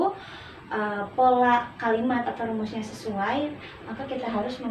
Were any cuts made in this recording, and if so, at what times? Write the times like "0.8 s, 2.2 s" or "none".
none